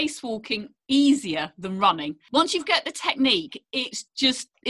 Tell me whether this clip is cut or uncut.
cut